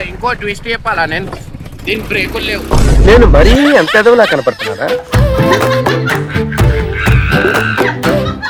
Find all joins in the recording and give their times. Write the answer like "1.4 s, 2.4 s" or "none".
none